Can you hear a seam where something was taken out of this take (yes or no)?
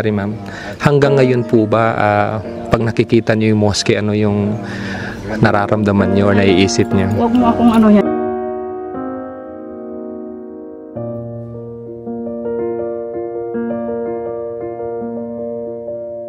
no